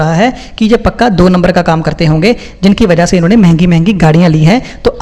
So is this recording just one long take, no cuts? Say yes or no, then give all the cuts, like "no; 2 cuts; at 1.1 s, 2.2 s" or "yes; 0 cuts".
yes; 0 cuts